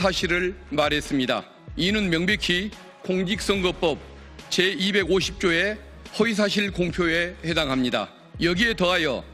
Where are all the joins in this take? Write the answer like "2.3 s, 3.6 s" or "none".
1.6 s, 8.2 s